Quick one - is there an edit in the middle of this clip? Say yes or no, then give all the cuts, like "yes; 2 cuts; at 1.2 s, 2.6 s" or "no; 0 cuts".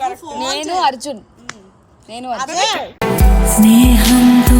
yes; 1 cut; at 2.9 s